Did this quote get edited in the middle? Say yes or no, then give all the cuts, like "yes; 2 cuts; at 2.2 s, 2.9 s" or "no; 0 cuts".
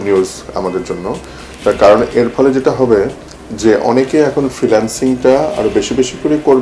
no; 0 cuts